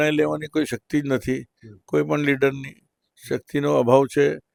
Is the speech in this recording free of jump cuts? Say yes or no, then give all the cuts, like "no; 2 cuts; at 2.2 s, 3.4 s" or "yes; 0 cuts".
yes; 0 cuts